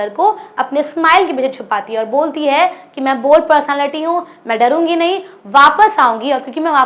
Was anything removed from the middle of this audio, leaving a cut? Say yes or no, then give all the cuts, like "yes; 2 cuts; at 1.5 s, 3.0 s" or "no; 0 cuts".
no; 0 cuts